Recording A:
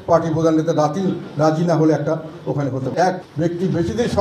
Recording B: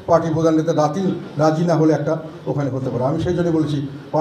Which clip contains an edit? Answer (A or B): A